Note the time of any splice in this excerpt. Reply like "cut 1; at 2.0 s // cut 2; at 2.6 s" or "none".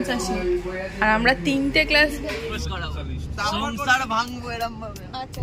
cut 1; at 2.5 s

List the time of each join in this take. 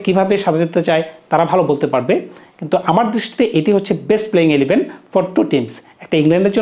none

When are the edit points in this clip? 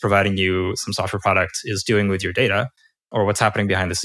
none

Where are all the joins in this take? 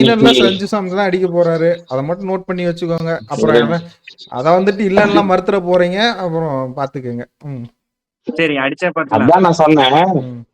none

